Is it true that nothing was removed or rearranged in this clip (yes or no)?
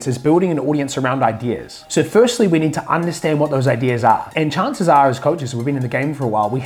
yes